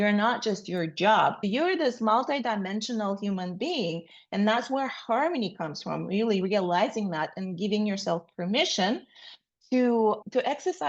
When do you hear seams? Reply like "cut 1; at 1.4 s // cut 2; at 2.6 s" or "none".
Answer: cut 1; at 1.4 s